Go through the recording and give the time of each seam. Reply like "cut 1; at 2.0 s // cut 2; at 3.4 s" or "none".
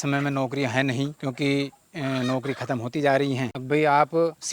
cut 1; at 1.2 s // cut 2; at 3.5 s